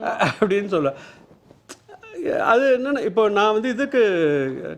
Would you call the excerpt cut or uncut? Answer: uncut